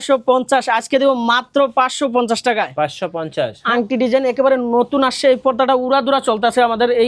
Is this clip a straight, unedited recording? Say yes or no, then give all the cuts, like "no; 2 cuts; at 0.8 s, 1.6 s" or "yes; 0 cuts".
no; 1 cut; at 3.6 s